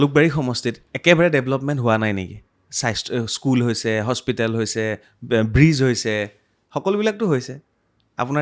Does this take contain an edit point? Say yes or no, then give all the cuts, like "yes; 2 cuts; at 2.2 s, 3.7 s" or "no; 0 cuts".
no; 0 cuts